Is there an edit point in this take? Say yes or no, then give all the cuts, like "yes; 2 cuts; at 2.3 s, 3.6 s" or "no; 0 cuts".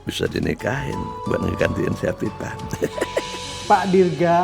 yes; 1 cut; at 3.5 s